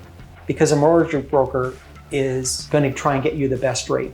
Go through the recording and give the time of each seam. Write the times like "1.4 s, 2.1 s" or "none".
2.6 s